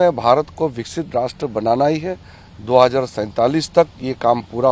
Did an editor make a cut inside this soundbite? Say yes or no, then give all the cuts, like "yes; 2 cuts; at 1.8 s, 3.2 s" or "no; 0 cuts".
no; 0 cuts